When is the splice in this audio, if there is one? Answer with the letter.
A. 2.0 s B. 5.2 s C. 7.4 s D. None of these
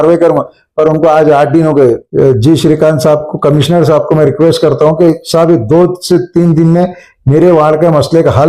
A